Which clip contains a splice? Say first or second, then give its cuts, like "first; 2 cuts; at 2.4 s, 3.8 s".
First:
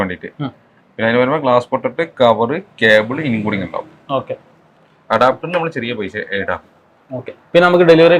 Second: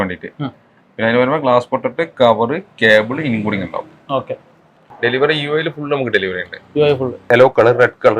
second; 2 cuts; at 4.9 s, 7.3 s